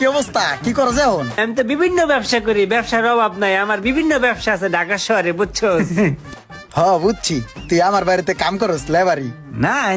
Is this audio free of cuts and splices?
no; 1 cut; at 1.4 s

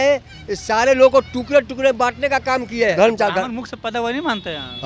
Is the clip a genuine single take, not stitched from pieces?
no; 1 cut; at 2.9 s

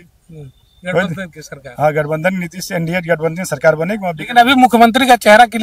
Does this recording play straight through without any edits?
yes; 0 cuts

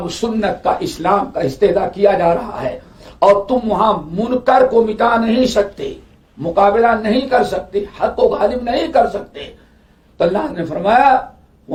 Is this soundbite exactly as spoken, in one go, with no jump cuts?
yes; 0 cuts

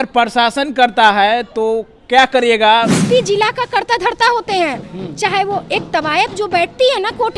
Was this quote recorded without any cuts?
no; 1 cut; at 3.0 s

